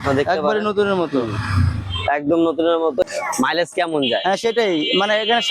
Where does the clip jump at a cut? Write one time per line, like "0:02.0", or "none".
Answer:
0:03.0